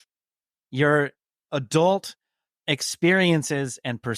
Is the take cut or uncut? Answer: uncut